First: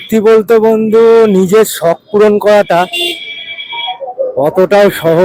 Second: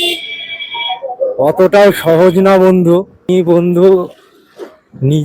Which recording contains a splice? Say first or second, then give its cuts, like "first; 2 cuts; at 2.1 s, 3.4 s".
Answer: second; 1 cut; at 3.2 s